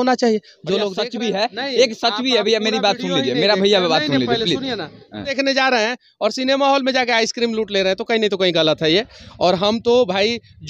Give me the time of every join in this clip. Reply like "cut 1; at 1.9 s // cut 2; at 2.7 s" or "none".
cut 1; at 0.9 s // cut 2; at 5.3 s